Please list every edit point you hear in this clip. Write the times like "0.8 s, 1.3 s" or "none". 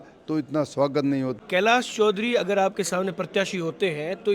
1.3 s